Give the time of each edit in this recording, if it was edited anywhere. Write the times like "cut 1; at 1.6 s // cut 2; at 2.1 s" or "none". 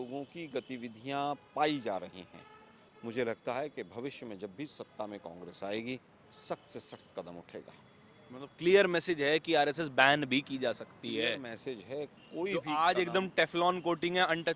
none